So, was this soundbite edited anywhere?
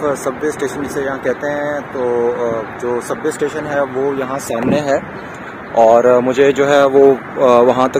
no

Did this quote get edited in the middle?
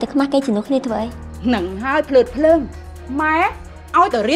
yes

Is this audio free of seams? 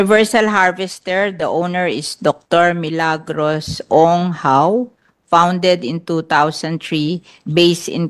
yes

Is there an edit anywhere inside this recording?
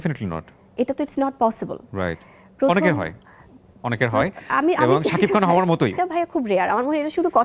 yes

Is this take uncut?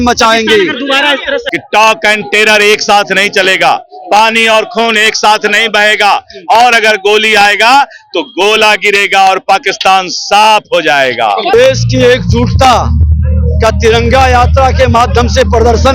no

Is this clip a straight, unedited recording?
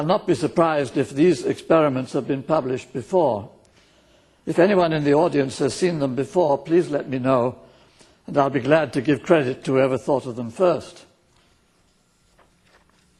yes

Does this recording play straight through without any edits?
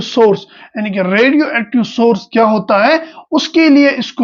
yes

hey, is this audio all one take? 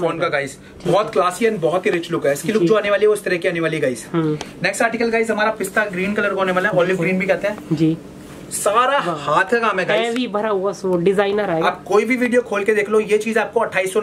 yes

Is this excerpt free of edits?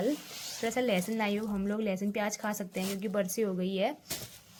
yes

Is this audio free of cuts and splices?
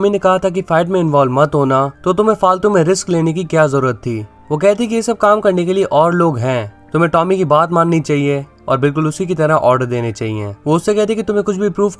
no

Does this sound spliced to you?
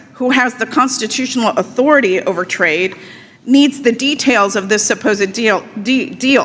no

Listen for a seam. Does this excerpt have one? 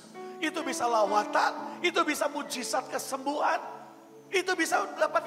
no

